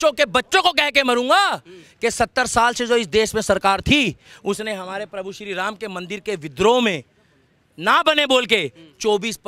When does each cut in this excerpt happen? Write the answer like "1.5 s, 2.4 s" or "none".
none